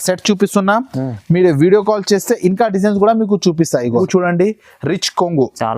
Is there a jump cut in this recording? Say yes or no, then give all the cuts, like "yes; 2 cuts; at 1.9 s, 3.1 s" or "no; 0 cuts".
yes; 1 cut; at 4.0 s